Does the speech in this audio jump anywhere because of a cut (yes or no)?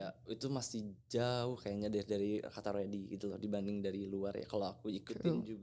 no